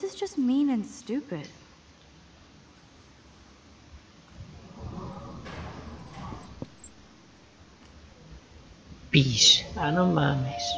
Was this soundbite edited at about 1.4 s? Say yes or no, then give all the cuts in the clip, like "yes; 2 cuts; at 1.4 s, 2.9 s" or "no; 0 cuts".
yes; 1 cut; at 1.4 s